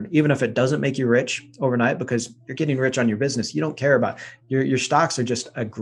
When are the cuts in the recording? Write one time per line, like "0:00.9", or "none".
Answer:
none